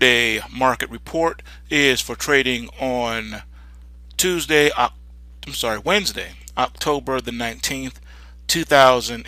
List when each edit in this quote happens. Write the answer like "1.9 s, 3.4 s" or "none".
none